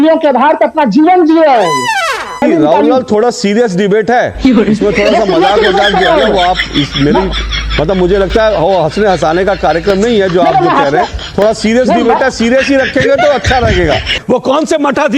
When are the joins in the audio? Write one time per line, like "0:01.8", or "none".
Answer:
0:02.4
0:14.2